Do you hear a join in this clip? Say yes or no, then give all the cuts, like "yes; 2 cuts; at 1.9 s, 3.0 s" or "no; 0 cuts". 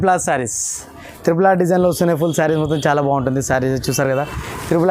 no; 0 cuts